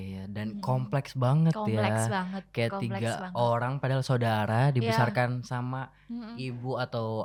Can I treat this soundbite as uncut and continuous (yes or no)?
yes